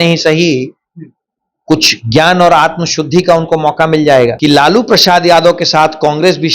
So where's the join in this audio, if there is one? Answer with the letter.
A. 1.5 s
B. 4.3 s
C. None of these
B